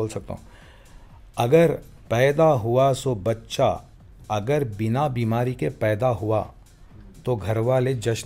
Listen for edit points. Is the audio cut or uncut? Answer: uncut